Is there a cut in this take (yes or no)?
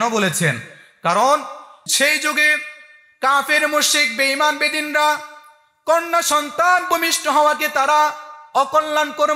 yes